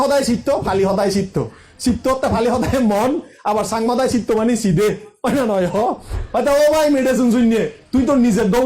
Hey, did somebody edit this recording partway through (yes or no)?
yes